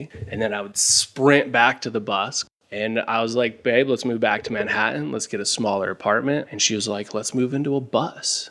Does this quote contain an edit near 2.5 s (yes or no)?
yes